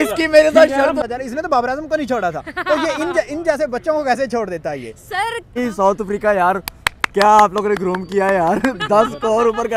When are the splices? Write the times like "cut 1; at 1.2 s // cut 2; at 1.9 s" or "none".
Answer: cut 1; at 1.0 s // cut 2; at 5.6 s

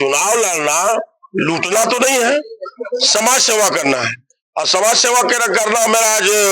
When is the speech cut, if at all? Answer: none

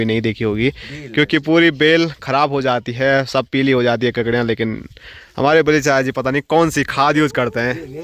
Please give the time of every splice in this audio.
none

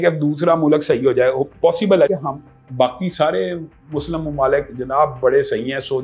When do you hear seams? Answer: cut 1; at 2.1 s

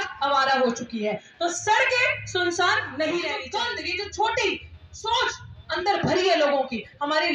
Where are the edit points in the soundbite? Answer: cut 1; at 3.4 s

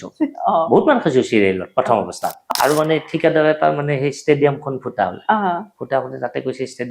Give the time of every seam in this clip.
cut 1; at 2.5 s

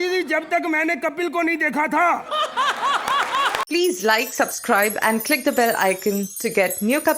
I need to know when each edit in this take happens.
cut 1; at 3.6 s

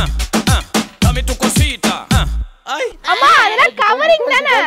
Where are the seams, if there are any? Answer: none

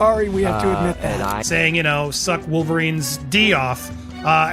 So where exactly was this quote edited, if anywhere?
cut 1; at 1.4 s

